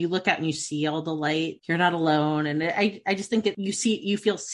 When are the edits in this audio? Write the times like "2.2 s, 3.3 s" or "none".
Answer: 3.6 s